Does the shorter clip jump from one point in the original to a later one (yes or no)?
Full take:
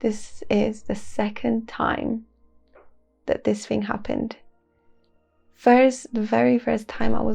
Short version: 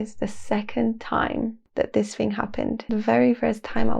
yes